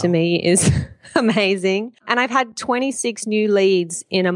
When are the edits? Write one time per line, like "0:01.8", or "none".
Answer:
0:02.0

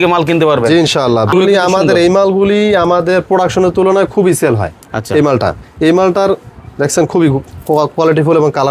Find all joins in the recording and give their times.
0:01.3

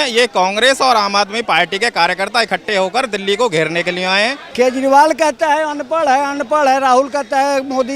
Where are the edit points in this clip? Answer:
0:04.4

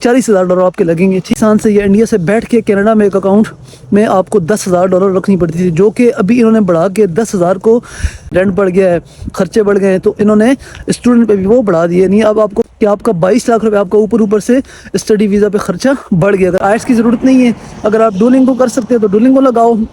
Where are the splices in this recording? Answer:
0:01.3
0:08.3
0:12.7
0:16.6

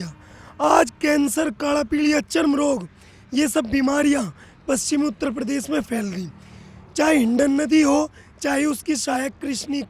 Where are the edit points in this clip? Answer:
none

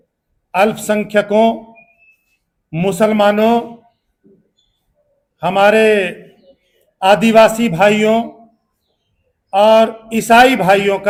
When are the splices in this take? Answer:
none

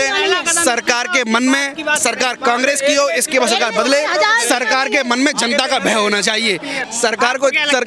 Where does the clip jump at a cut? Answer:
0:06.7

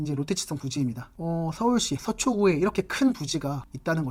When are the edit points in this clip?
none

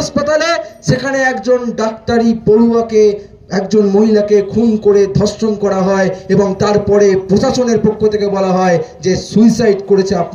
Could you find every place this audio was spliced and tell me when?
none

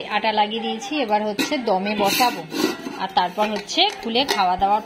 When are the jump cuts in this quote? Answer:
none

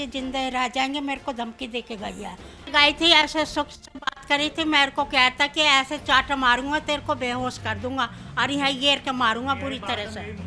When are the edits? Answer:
0:02.7

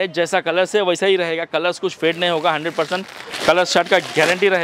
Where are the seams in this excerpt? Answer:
none

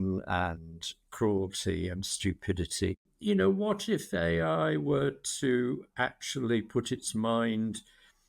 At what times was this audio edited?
0:03.1

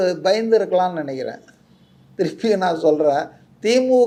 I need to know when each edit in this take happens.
none

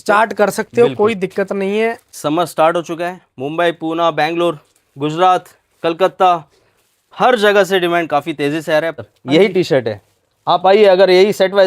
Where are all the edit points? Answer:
0:02.1
0:09.0

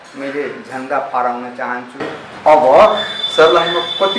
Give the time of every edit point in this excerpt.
0:02.2

